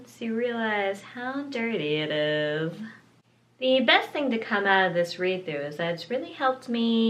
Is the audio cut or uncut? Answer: cut